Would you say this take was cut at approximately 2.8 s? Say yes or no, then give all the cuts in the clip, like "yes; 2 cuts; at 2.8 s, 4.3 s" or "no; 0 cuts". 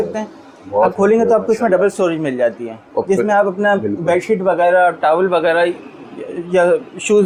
no; 0 cuts